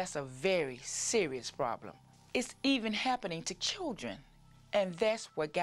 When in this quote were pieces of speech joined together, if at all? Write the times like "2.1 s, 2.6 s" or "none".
2.1 s